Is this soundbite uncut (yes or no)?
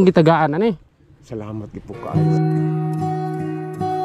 no